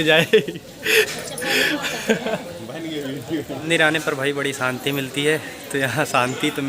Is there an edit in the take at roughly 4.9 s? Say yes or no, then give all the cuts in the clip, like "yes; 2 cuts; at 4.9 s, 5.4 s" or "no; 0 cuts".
no; 1 cut; at 3.6 s